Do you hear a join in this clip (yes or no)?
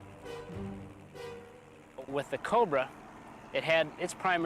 no